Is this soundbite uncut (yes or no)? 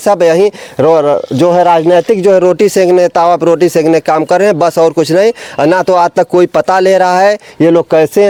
yes